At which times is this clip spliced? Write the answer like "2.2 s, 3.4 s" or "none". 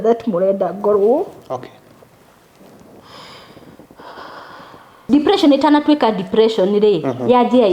5.0 s